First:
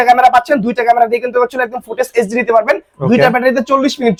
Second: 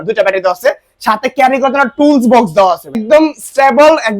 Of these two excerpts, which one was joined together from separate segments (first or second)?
second